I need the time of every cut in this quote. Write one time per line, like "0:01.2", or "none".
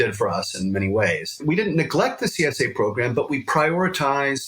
0:01.3